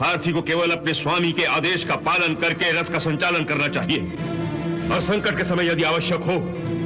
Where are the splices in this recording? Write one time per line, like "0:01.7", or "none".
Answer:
none